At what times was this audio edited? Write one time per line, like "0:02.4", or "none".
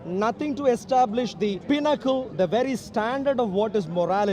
0:01.6